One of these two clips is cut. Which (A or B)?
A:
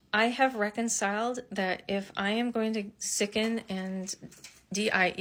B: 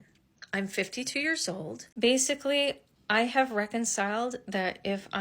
B